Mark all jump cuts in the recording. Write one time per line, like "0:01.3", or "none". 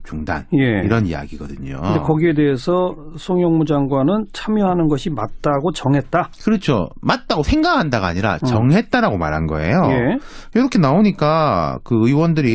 0:01.7